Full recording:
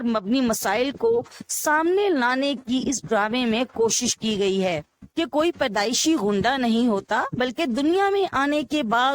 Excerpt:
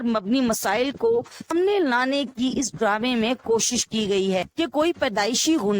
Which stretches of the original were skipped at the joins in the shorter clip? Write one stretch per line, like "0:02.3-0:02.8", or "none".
0:01.5-0:01.8
0:04.8-0:05.1